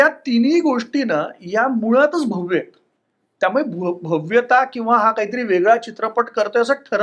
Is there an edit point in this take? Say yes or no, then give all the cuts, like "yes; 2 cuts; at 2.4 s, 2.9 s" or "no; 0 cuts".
no; 0 cuts